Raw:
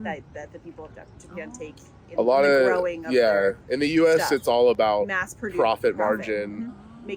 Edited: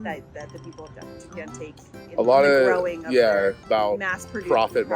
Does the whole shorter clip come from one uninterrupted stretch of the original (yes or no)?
no